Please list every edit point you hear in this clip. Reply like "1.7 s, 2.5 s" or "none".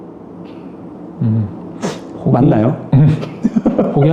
none